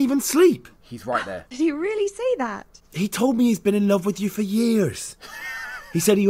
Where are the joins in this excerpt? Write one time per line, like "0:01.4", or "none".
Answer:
0:01.4